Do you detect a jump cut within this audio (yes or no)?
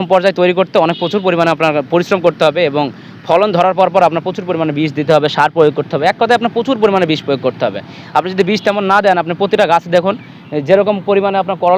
no